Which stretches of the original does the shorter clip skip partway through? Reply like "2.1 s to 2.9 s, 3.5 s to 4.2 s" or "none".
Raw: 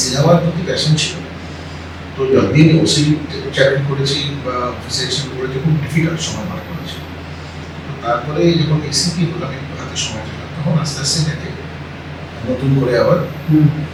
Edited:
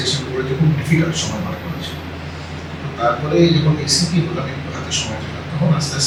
none